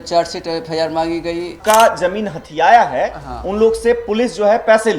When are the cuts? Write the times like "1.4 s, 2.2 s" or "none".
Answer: 1.5 s